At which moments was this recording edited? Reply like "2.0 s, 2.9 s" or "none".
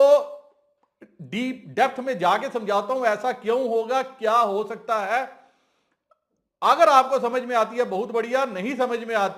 none